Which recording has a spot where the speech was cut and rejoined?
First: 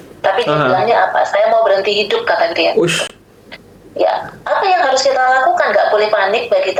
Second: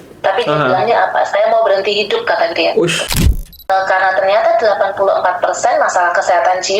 second; 1 cut; at 3.5 s

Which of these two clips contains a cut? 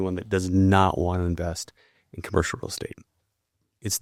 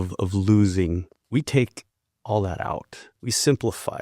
second; 2 cuts; at 1.1 s, 3.0 s

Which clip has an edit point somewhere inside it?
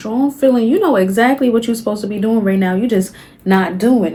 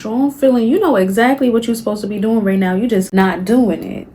second; 1 cut; at 3.1 s

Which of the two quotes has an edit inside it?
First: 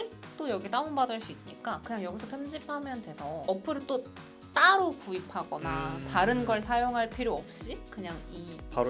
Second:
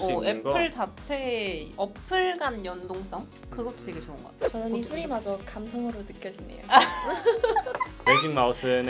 second; 2 cuts; at 4.3 s, 7.8 s

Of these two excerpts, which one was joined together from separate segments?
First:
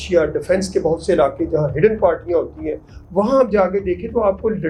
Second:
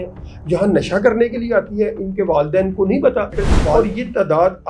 second; 1 cut; at 3.5 s

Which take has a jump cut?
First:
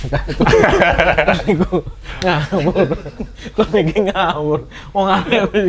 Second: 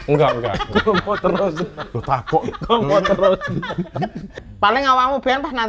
second; 1 cut; at 4.3 s

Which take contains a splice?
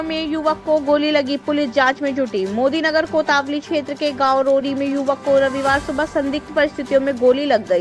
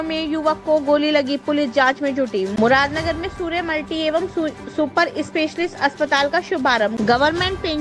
second; 2 cuts; at 2.5 s, 6.9 s

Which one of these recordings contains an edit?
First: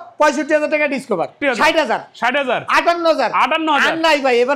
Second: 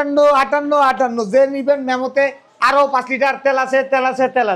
first; 1 cut; at 1.4 s

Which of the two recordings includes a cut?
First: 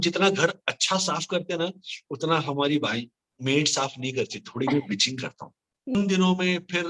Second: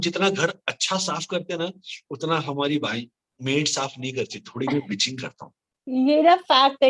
first; 1 cut; at 5.9 s

